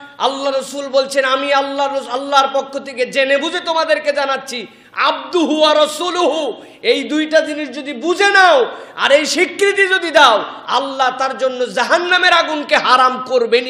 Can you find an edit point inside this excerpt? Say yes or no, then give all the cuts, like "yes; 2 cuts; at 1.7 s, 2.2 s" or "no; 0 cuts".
no; 0 cuts